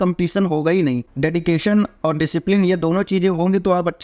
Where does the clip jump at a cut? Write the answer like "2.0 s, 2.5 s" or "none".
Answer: 1.1 s